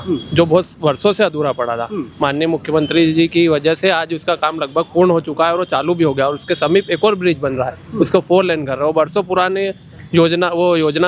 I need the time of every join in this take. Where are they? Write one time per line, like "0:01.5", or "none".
none